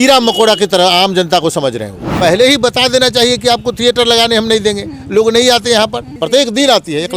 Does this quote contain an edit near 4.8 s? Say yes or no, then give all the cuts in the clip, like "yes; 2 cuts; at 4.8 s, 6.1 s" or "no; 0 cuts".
no; 2 cuts; at 2.1 s, 6.1 s